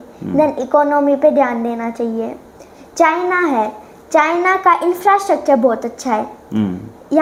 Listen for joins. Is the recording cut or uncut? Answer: uncut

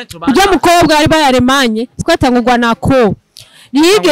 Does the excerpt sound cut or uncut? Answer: cut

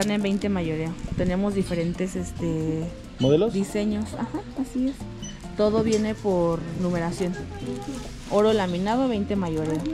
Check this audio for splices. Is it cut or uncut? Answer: uncut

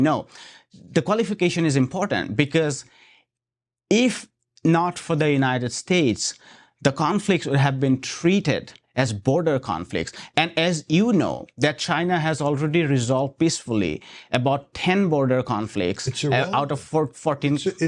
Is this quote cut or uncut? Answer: uncut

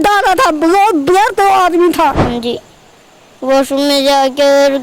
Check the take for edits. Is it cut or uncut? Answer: cut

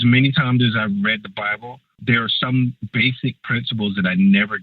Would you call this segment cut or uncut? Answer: cut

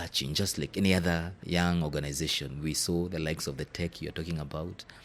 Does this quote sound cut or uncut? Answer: cut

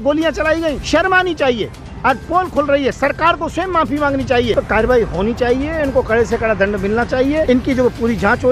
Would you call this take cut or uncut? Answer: cut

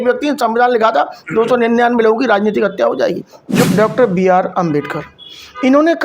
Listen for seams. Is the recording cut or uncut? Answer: cut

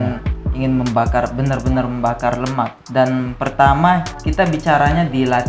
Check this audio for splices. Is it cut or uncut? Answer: cut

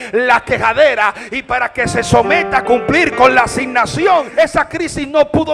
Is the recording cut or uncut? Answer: cut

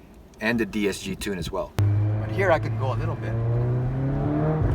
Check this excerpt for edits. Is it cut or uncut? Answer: cut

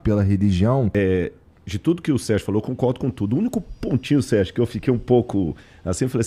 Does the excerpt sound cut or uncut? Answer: uncut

